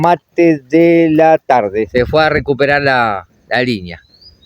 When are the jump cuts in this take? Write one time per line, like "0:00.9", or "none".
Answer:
0:01.9